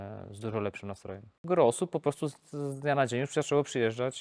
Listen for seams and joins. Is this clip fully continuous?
no; 1 cut; at 1.3 s

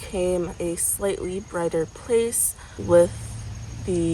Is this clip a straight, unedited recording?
no; 1 cut; at 2.8 s

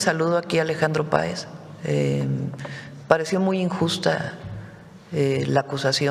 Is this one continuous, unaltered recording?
yes; 0 cuts

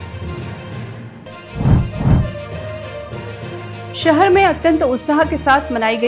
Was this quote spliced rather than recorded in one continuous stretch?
yes; 1 cut; at 1.1 s

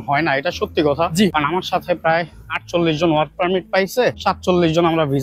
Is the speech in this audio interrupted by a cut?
yes; 2 cuts; at 1.3 s, 4.2 s

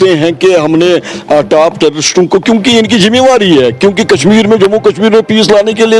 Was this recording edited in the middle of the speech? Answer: no; 0 cuts

